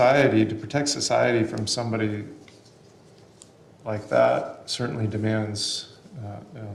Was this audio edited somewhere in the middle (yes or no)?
no